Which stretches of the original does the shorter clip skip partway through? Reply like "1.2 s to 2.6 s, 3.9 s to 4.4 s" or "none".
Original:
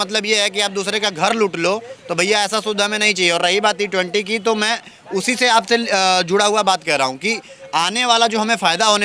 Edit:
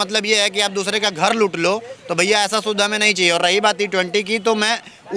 none

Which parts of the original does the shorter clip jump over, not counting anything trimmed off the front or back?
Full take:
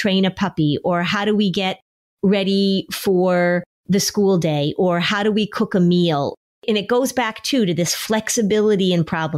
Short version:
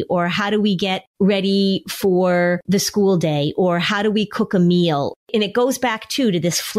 1.8 s to 2.1 s, 3.6 s to 3.8 s, 6.4 s to 6.5 s

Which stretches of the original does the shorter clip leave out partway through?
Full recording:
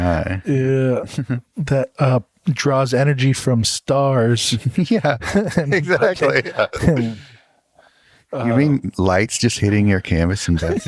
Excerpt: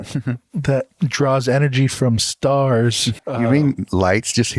1.9 s to 2.3 s, 4.6 s to 8.2 s

